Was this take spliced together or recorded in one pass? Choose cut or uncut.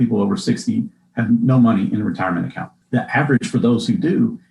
uncut